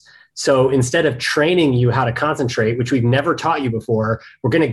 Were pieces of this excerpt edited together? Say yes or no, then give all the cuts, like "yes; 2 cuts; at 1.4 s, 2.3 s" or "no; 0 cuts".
no; 0 cuts